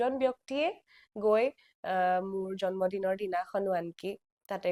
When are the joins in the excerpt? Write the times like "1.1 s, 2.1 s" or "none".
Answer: none